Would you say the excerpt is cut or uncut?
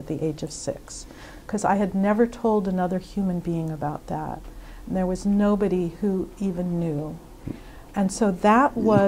uncut